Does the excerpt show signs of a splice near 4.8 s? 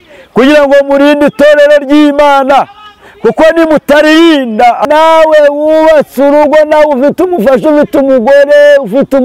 yes; 1 cut; at 4.8 s

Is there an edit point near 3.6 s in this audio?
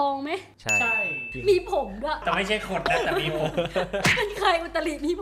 no; 1 cut; at 2.2 s

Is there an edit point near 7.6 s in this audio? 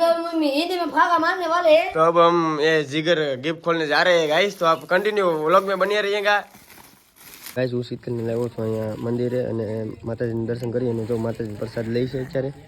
yes; 1 cut; at 7.6 s

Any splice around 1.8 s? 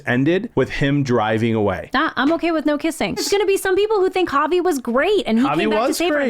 yes; 2 cuts; at 1.8 s, 3.2 s

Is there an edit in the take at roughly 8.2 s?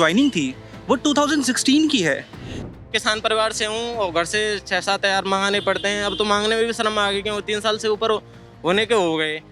no; 1 cut; at 2.7 s

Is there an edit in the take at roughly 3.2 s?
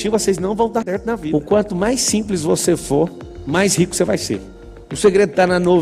no; 2 cuts; at 1.4 s, 4.6 s

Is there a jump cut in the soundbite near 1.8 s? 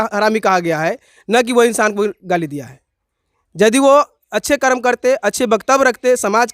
no; 0 cuts

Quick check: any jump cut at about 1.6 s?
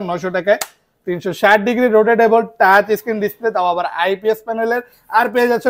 no; 0 cuts

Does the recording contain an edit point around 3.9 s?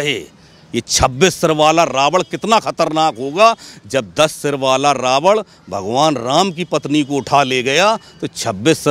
no; 0 cuts

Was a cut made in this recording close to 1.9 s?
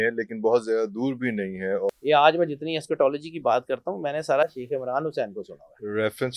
yes; 1 cut; at 1.9 s

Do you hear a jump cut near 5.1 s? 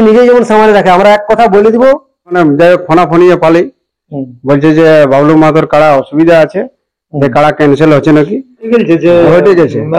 no; 2 cuts; at 2.4 s, 8.7 s

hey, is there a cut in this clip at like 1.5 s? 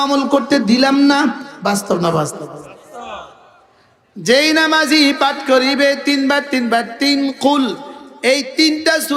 yes; 1 cut; at 1.5 s

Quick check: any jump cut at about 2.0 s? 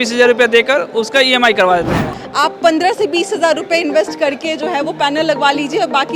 yes; 1 cut; at 2.0 s

